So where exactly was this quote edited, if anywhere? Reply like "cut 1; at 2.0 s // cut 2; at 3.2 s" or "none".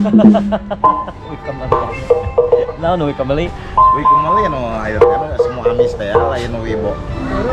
none